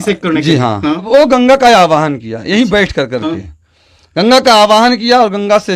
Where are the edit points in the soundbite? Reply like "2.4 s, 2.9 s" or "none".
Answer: 1.1 s